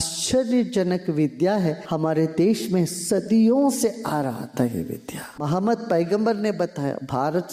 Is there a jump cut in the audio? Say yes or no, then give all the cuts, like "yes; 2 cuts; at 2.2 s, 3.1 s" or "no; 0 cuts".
yes; 2 cuts; at 1.8 s, 5.4 s